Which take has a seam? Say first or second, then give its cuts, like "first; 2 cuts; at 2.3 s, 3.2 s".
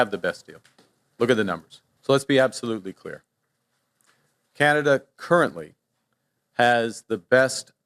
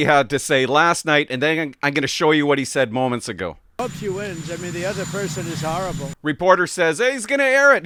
first; 1 cut; at 1.8 s